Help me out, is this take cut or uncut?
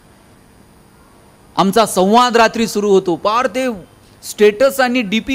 uncut